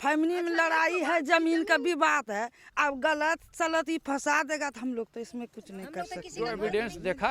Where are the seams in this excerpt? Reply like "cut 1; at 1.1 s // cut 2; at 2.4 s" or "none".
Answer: cut 1; at 6.2 s